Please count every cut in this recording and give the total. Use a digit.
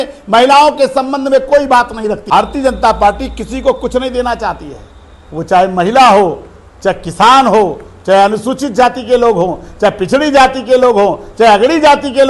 1